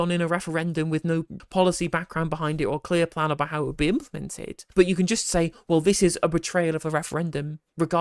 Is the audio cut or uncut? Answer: cut